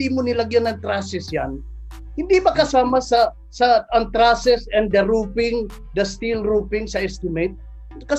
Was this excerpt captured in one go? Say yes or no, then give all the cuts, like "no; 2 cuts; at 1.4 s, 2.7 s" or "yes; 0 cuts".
yes; 0 cuts